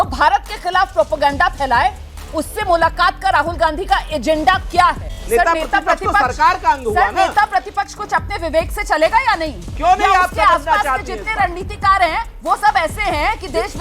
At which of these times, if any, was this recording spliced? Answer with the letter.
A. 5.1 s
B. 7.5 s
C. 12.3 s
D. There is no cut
A